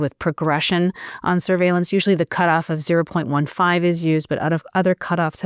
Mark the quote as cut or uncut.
uncut